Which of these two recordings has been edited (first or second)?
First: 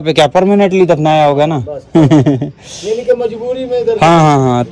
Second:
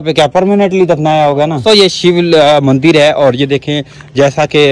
second